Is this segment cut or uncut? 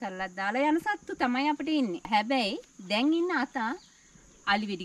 cut